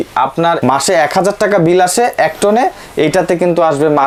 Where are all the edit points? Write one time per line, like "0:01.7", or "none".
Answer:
none